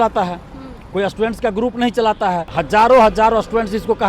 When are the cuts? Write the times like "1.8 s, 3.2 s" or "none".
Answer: 2.5 s